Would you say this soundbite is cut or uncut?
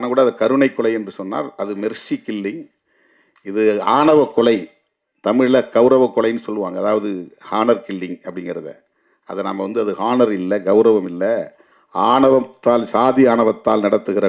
uncut